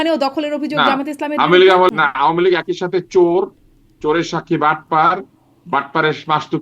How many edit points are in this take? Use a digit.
1